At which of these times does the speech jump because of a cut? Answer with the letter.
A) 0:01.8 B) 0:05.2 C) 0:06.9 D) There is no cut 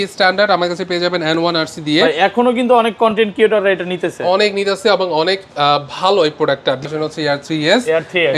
C